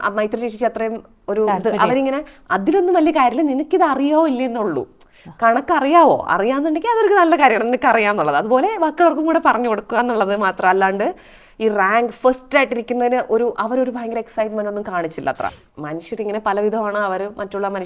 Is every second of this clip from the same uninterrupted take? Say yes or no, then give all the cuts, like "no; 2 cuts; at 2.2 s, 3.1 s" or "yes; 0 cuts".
no; 1 cut; at 15.6 s